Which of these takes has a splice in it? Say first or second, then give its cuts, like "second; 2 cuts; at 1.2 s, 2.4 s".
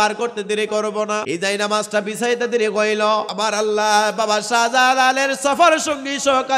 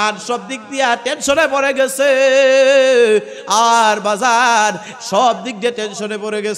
first; 2 cuts; at 1.2 s, 3.3 s